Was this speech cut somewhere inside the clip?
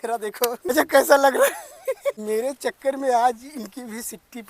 yes; 2 cuts; at 0.7 s, 2.2 s

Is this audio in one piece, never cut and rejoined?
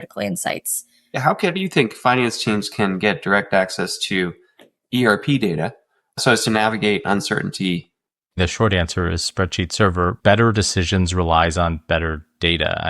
no; 4 cuts; at 1.1 s, 6.2 s, 8.4 s, 10.2 s

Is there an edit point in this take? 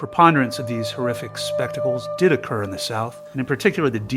yes; 1 cut; at 3.2 s

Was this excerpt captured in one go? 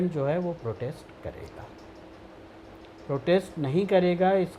yes; 0 cuts

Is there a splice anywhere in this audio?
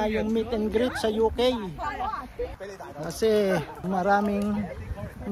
yes; 2 cuts; at 2.6 s, 3.8 s

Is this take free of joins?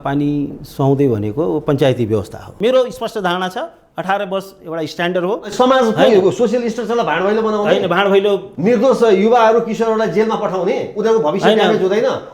no; 1 cut; at 2.4 s

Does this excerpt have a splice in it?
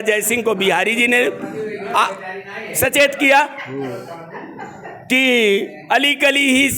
no; 0 cuts

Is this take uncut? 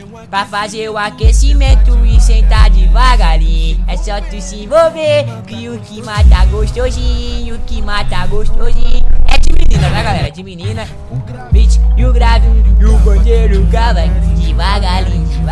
yes; 0 cuts

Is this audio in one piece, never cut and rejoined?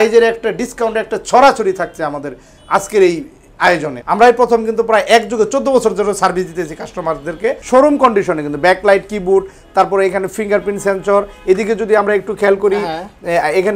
no; 2 cuts; at 4.0 s, 7.6 s

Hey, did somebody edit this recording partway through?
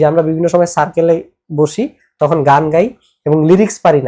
no; 0 cuts

